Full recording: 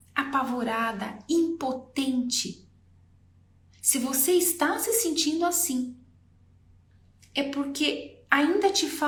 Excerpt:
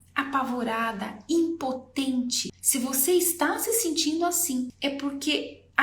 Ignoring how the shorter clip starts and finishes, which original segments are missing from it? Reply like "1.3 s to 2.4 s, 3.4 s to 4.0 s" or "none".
2.5 s to 3.7 s, 5.9 s to 7.3 s